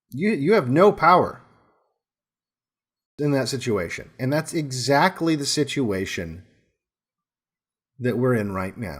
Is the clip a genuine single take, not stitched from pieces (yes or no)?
no